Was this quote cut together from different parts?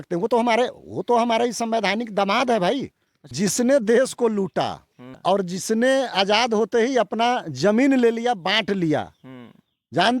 yes; 1 cut; at 3.2 s

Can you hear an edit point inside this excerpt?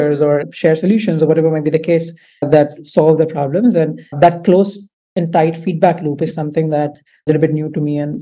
yes; 1 cut; at 7.2 s

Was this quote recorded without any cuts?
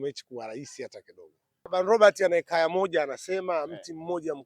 no; 1 cut; at 1.6 s

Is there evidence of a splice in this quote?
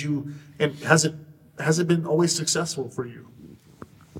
no; 0 cuts

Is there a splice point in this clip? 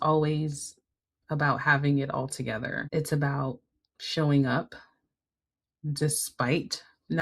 yes; 1 cut; at 2.8 s

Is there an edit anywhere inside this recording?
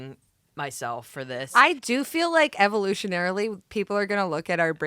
yes; 1 cut; at 1.6 s

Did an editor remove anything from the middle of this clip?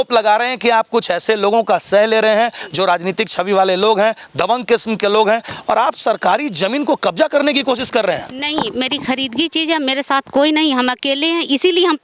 no; 0 cuts

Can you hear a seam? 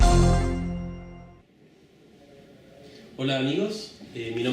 no; 0 cuts

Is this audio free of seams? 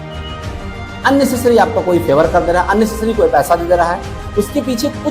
no; 1 cut; at 1.0 s

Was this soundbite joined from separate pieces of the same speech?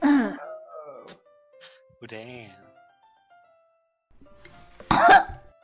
yes; 1 cut; at 3.2 s

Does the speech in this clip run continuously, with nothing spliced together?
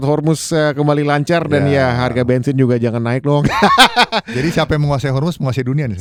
yes; 0 cuts

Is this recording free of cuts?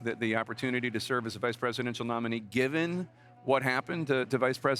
yes; 0 cuts

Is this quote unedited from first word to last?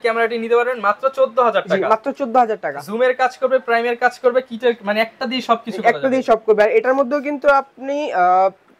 yes; 0 cuts

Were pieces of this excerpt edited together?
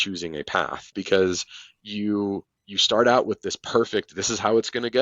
yes; 1 cut; at 1.0 s

